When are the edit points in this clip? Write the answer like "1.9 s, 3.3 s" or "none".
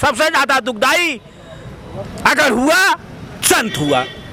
none